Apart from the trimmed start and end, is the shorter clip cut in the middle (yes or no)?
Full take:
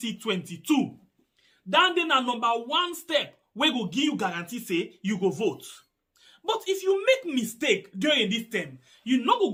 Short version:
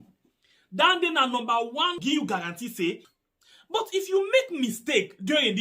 yes